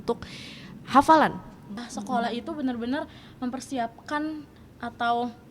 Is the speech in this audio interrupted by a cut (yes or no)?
yes